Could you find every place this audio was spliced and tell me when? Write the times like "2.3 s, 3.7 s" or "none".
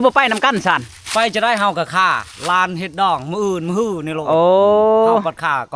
none